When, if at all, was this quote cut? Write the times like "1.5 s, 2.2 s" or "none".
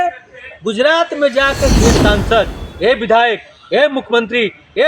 1.7 s

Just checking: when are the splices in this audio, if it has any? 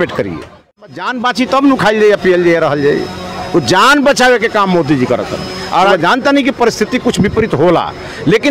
0.9 s, 5.9 s

